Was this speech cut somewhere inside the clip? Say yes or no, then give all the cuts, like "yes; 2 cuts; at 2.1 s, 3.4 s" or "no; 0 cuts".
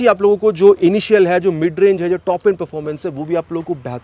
no; 0 cuts